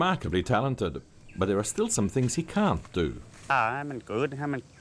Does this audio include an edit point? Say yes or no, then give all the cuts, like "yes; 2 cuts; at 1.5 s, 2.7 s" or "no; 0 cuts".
yes; 1 cut; at 3.5 s